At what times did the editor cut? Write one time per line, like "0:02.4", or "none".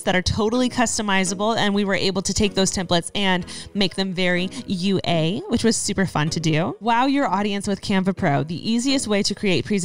0:06.8